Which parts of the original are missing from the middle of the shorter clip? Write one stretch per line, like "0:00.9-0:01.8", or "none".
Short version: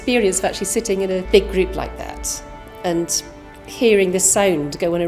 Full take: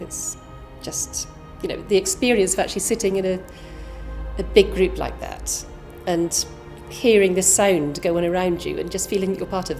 0:03.4-0:04.5